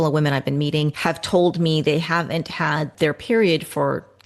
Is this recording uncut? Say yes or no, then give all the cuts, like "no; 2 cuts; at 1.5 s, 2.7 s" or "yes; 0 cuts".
no; 2 cuts; at 1.0 s, 2.9 s